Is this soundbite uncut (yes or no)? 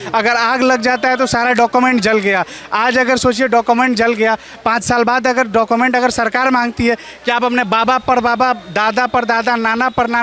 yes